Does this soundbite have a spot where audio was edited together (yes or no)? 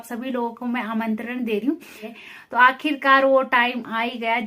yes